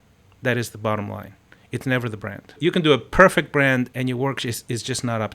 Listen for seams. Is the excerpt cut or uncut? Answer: cut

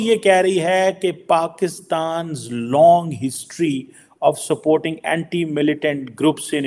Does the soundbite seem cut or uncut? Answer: uncut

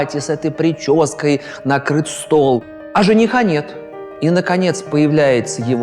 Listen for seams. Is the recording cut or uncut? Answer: cut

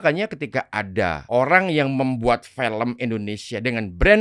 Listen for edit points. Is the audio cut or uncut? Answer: cut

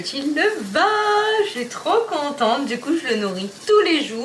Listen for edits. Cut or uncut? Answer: uncut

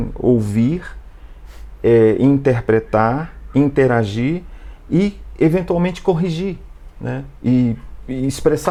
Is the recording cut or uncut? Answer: uncut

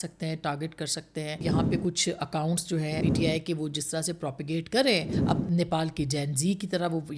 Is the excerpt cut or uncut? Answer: cut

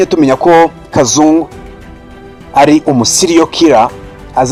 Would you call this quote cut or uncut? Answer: uncut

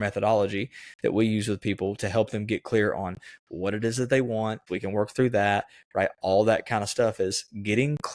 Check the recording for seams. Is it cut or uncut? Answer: cut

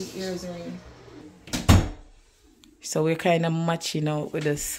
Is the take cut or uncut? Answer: cut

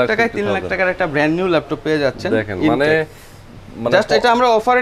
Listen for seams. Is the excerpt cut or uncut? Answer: uncut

